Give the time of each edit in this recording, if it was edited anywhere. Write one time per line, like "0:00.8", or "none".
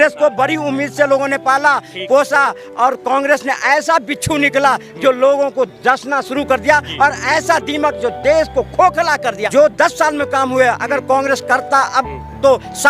0:09.4